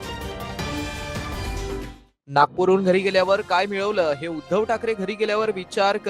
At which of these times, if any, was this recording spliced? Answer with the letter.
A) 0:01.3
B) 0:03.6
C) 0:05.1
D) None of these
A